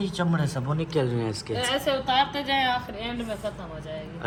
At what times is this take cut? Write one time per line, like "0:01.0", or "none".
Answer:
none